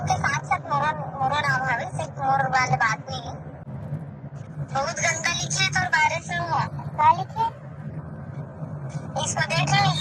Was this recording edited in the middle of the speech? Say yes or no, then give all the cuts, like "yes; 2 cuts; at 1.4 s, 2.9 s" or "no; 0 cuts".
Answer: yes; 1 cut; at 3.6 s